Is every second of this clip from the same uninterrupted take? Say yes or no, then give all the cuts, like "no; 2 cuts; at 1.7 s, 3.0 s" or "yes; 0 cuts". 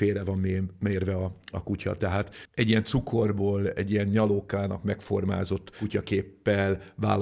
yes; 0 cuts